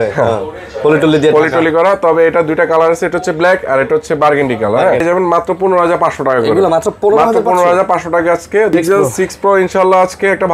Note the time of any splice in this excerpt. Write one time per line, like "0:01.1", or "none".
0:05.0
0:08.7